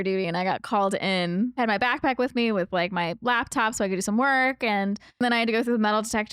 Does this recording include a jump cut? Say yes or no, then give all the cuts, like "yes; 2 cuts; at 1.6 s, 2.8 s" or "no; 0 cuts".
yes; 2 cuts; at 1.6 s, 5.2 s